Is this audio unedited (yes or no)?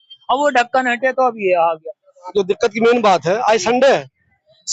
yes